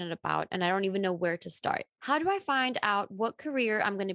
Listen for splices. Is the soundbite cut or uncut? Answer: cut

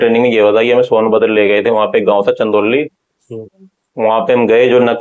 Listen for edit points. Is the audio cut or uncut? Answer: uncut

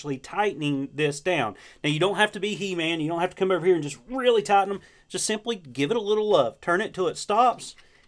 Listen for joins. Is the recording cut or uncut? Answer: uncut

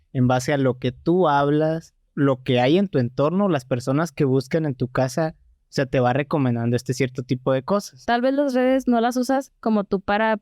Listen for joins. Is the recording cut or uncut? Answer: cut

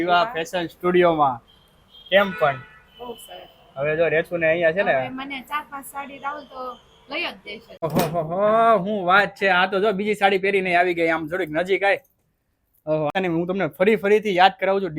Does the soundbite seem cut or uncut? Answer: cut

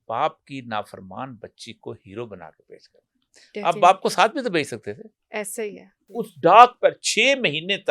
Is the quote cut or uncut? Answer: cut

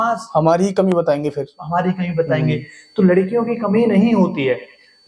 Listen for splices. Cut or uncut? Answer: uncut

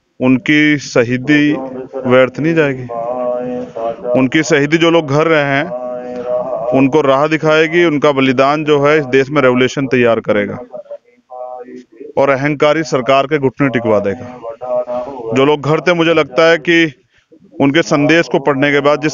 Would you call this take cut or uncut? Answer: uncut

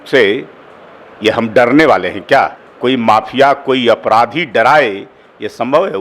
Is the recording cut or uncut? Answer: cut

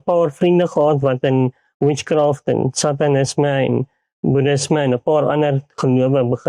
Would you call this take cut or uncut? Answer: uncut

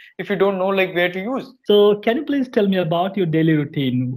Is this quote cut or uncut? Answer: cut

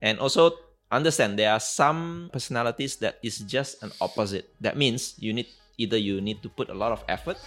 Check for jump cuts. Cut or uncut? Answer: cut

